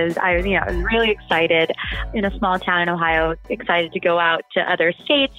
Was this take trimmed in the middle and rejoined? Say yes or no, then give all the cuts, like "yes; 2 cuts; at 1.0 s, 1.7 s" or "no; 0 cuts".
yes; 1 cut; at 2.0 s